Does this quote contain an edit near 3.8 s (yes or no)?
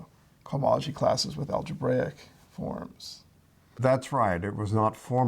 yes